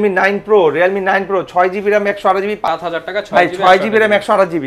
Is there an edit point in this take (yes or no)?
yes